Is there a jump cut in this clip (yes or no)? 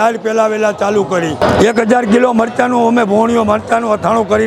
yes